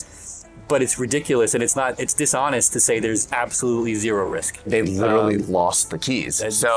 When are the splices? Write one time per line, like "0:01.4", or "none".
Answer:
0:04.7